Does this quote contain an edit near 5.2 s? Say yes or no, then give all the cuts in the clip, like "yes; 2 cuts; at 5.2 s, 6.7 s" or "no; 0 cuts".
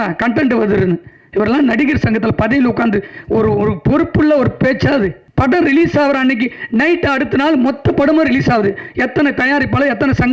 yes; 1 cut; at 5.2 s